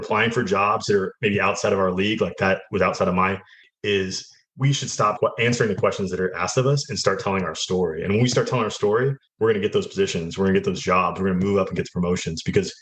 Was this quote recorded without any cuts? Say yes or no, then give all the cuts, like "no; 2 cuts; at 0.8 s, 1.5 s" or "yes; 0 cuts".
no; 3 cuts; at 3.6 s, 5.2 s, 9.2 s